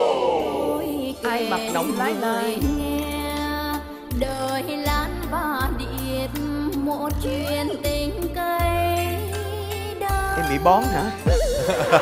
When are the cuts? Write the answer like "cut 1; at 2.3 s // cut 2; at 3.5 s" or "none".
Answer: none